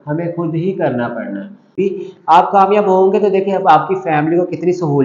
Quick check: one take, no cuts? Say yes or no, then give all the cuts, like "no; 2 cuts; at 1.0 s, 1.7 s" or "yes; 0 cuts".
no; 1 cut; at 1.7 s